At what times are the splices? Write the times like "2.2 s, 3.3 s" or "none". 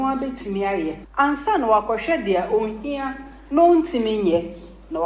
none